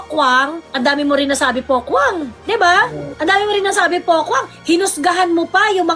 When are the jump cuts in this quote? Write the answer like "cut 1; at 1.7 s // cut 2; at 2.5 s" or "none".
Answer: none

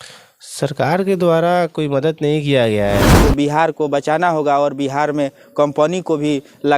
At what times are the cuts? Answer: cut 1; at 3.2 s

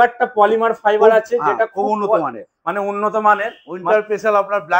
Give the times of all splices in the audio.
cut 1; at 3.7 s

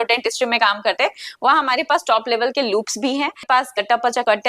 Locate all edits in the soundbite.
cut 1; at 3.4 s

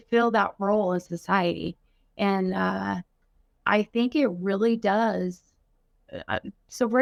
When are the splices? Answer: none

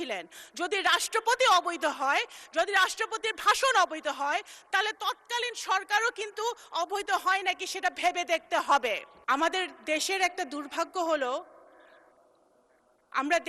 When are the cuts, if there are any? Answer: cut 1; at 9.1 s

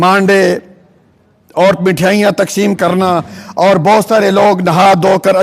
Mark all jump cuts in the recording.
none

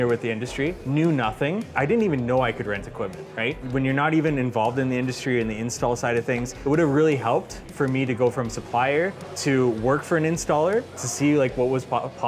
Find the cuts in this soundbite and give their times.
cut 1; at 0.8 s // cut 2; at 1.7 s // cut 3; at 3.6 s // cut 4; at 6.5 s // cut 5; at 9.3 s

